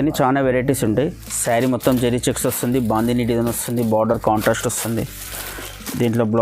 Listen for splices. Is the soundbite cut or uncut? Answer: cut